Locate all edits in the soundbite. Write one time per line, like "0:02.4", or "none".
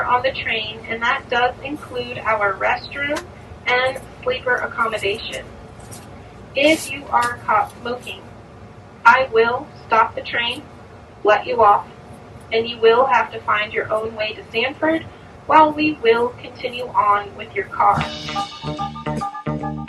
0:18.1

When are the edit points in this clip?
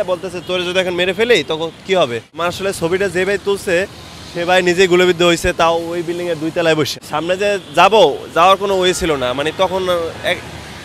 0:02.3
0:06.9

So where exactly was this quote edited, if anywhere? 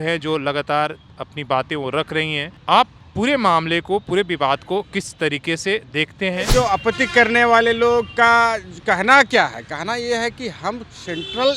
0:02.5
0:03.0
0:06.5

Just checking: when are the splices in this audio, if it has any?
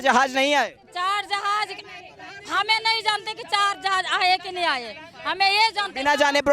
none

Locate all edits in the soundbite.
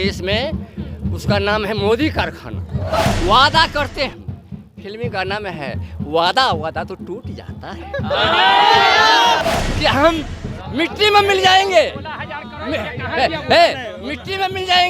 0:03.0
0:09.4

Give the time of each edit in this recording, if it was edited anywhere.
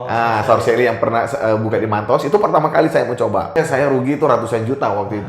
0:03.6

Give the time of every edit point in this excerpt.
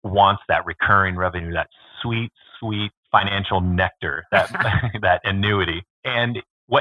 0:05.9

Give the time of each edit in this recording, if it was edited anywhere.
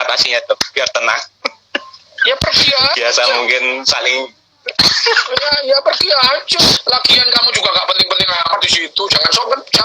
0:06.8

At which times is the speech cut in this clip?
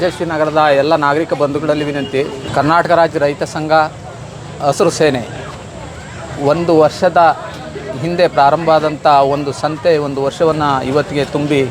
0:02.4

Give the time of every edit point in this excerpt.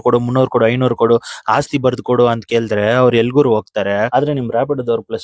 0:04.1

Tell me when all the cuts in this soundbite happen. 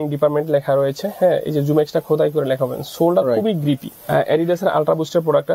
0:03.9

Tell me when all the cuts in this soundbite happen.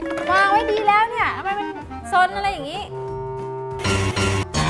0:03.3

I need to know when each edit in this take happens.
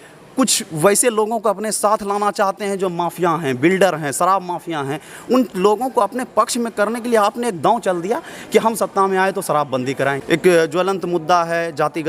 0:10.2

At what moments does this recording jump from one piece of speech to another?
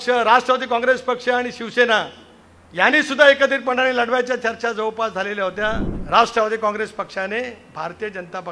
0:05.9

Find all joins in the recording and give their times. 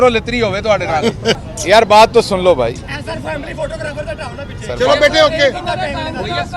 0:01.4

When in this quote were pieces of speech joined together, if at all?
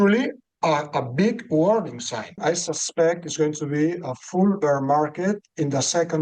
0:02.4

